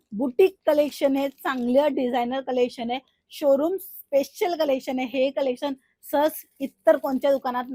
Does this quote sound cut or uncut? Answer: uncut